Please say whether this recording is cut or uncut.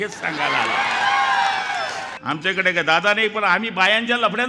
cut